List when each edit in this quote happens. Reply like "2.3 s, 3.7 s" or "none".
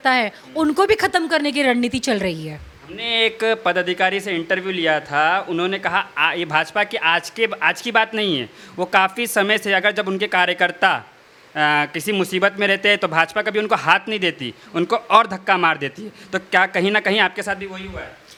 none

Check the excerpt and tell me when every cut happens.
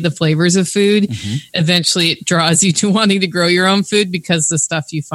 none

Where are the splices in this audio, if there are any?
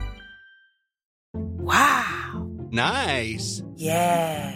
1.2 s

